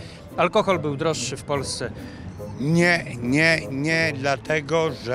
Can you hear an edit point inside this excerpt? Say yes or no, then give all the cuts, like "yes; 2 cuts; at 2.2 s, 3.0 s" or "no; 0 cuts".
no; 0 cuts